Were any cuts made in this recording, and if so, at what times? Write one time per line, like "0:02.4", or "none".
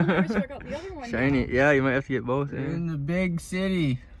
0:02.9